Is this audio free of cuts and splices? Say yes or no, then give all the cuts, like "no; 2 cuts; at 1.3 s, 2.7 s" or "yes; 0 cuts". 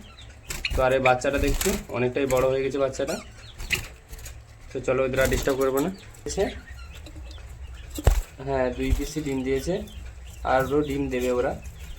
no; 1 cut; at 6.3 s